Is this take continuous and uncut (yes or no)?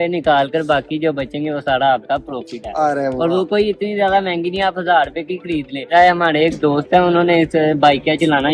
no